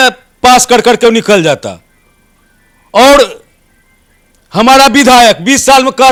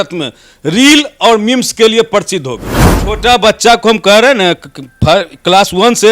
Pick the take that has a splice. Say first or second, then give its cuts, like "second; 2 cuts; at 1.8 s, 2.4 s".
second; 1 cut; at 3.0 s